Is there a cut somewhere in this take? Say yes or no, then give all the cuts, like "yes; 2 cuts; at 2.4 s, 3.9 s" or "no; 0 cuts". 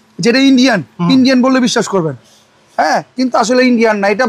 no; 0 cuts